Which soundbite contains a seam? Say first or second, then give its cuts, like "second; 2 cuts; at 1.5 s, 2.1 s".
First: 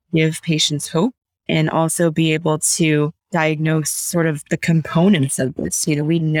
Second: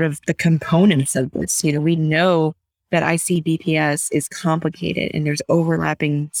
first; 1 cut; at 3.2 s